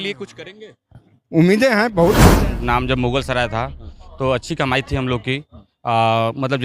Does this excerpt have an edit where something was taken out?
yes; 1 cut; at 2.4 s

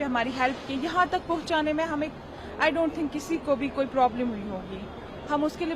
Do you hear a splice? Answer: no; 0 cuts

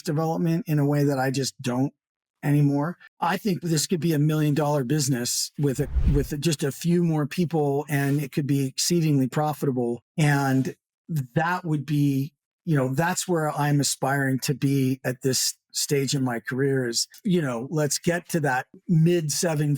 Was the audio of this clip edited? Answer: no; 0 cuts

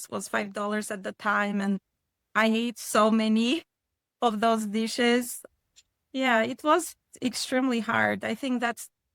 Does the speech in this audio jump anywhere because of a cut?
yes; 1 cut; at 5.4 s

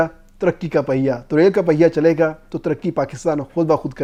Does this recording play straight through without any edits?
yes; 0 cuts

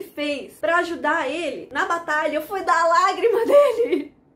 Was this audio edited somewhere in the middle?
yes; 1 cut; at 1.7 s

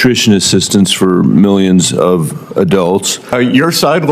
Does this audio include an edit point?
yes; 1 cut; at 3.2 s

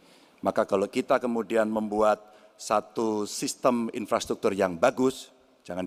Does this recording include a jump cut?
no; 0 cuts

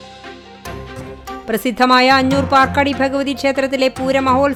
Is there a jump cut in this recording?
no; 0 cuts

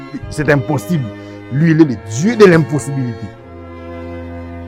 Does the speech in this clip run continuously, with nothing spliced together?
yes; 0 cuts

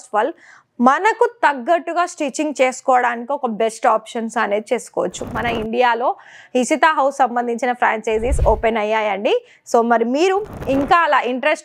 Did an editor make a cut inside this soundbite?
yes; 1 cut; at 5.3 s

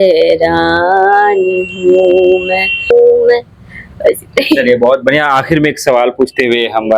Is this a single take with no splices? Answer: yes; 0 cuts

